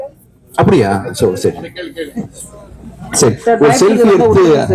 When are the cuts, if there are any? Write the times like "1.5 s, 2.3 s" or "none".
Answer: none